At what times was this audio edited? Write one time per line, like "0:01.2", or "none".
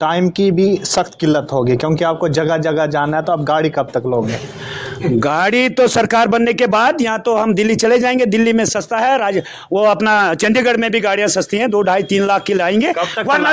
none